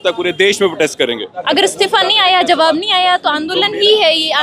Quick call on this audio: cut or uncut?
cut